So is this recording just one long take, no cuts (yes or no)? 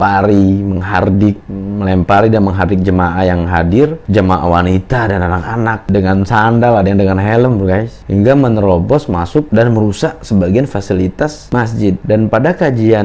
yes